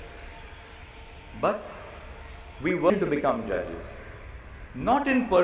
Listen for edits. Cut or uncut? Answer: cut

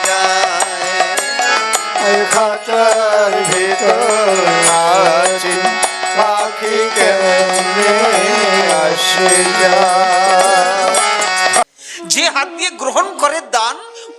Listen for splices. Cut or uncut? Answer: cut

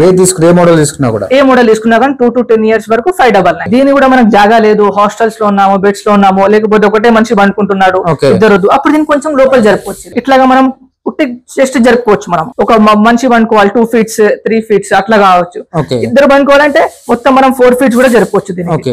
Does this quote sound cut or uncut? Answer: cut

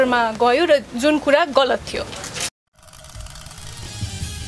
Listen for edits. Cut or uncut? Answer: cut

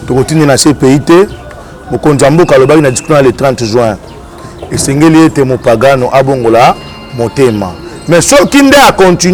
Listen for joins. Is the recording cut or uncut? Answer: uncut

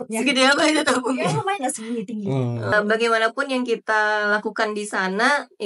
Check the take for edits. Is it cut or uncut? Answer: cut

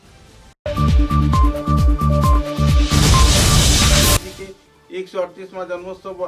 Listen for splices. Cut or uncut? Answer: cut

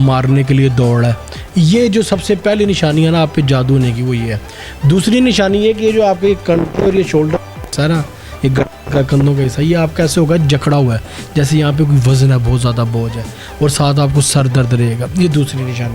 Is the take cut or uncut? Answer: uncut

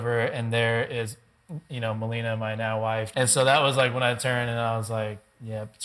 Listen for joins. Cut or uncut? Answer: cut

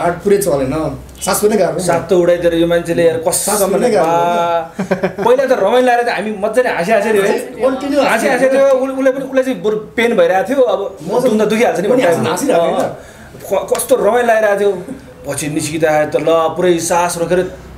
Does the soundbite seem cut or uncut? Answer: uncut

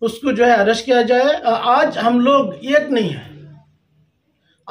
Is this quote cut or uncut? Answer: cut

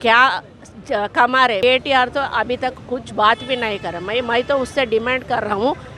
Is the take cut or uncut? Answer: cut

